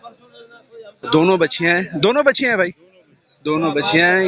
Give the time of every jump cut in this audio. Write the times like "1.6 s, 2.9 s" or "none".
none